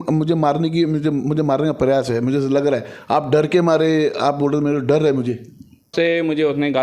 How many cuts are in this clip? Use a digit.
2